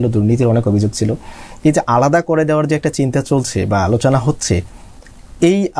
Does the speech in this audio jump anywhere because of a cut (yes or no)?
no